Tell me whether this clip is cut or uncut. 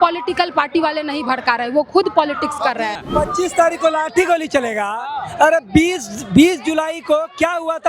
cut